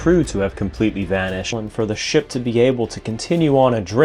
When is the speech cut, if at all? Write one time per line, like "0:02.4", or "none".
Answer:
none

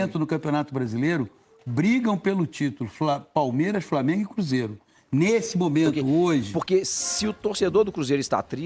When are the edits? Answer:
0:06.5

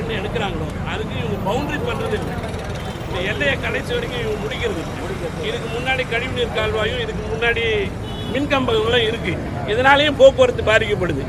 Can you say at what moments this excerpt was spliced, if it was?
none

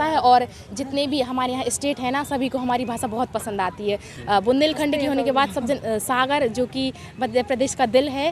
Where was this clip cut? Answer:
none

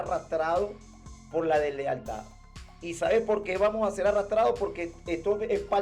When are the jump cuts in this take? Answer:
none

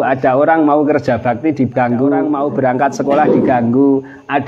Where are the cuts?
0:02.3

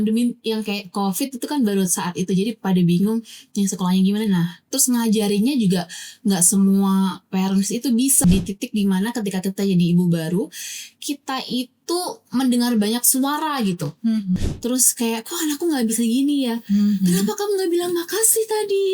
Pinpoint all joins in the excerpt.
0:08.2
0:14.4

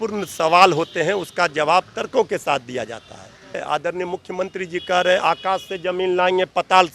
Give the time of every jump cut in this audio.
0:03.6

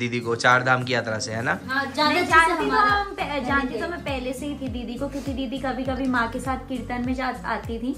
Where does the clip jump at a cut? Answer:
none

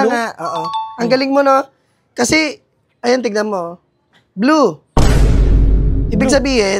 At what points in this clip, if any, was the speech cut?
none

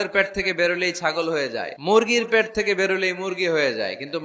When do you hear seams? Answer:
0:01.7

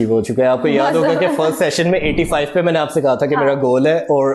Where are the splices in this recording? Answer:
none

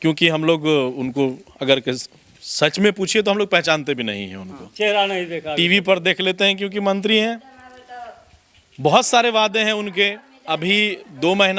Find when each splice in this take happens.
none

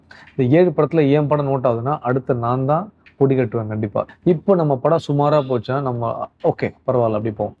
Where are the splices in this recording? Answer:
0:04.1

